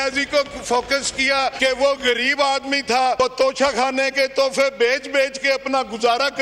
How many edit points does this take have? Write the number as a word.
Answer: two